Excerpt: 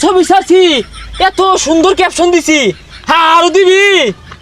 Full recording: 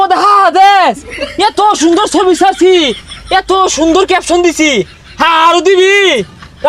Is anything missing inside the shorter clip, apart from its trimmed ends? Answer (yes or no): no